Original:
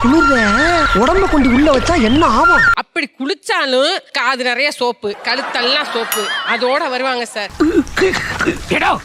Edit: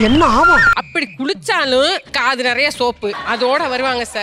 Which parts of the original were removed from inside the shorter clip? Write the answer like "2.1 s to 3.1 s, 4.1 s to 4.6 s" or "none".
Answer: 5.2 s to 6.4 s